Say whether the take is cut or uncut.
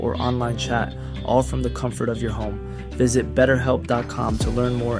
uncut